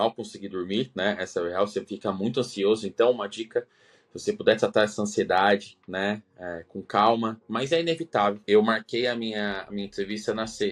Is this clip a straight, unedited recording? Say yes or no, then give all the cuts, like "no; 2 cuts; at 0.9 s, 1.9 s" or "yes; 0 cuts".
no; 1 cut; at 8.4 s